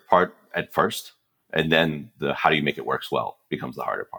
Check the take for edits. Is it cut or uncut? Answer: uncut